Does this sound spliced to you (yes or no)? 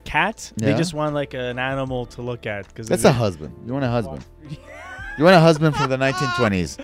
no